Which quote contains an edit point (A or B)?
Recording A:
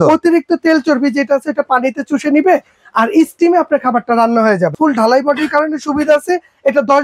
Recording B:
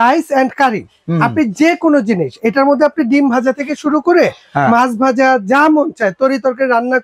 A